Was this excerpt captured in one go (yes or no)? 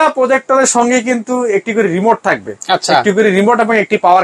yes